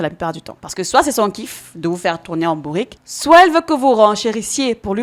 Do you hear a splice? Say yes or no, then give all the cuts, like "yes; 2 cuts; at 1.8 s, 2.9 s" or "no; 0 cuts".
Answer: no; 0 cuts